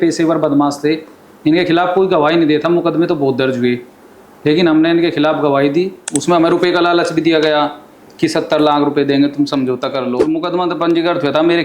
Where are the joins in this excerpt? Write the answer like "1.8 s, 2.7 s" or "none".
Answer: 6.1 s, 10.2 s